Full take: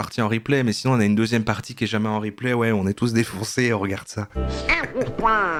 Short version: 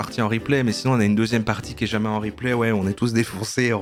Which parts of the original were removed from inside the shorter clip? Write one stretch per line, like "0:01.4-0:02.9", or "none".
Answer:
none